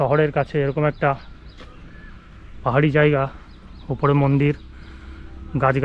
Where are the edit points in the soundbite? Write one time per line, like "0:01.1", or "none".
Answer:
none